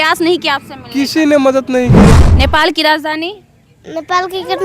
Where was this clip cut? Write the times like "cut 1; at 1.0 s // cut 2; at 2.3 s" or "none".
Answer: cut 1; at 2.1 s